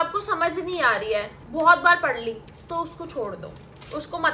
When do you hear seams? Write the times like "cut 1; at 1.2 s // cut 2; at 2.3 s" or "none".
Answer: none